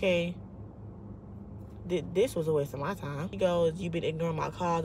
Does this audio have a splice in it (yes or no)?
yes